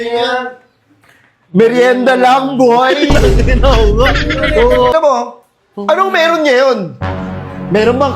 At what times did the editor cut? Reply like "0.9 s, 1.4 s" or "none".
4.9 s